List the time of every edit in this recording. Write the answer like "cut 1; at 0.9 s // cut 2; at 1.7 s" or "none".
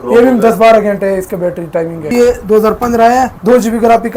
cut 1; at 2.1 s // cut 2; at 3.3 s